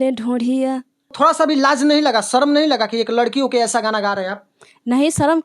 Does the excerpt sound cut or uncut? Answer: cut